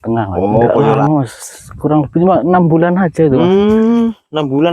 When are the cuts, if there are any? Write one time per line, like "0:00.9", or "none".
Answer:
0:01.0